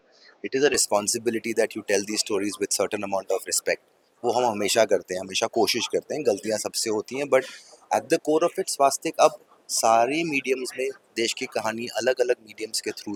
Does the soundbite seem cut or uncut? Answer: uncut